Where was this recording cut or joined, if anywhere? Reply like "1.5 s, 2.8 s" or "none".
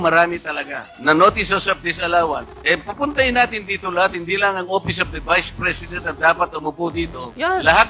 none